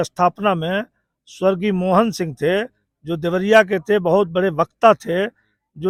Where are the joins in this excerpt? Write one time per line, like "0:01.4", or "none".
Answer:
none